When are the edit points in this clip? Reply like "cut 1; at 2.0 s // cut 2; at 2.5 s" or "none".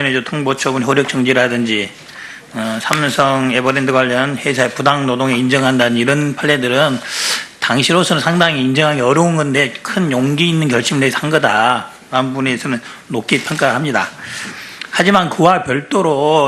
none